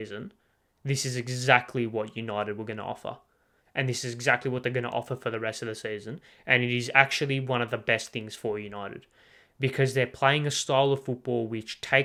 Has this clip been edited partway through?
no; 0 cuts

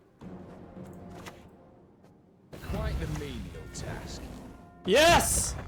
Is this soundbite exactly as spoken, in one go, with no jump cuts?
yes; 0 cuts

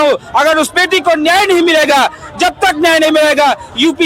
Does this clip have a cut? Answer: no; 0 cuts

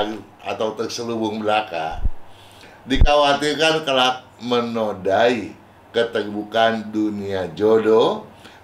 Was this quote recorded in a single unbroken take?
yes; 0 cuts

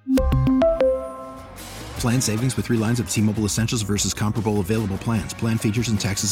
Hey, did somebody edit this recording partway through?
no; 0 cuts

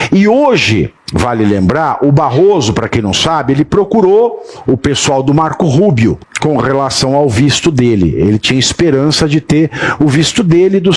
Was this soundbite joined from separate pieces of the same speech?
yes; 2 cuts; at 1.0 s, 6.3 s

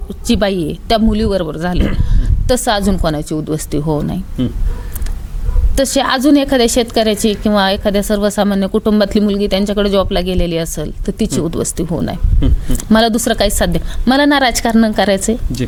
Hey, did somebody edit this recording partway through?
no; 0 cuts

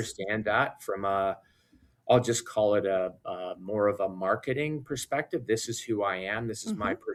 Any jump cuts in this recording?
no; 0 cuts

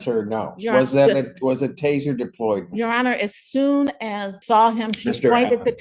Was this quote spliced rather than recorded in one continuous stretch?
yes; 1 cut; at 4.3 s

